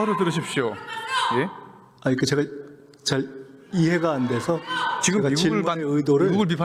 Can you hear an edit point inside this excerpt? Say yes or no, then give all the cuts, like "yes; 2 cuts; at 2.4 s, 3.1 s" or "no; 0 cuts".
no; 0 cuts